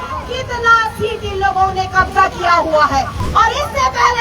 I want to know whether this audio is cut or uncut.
cut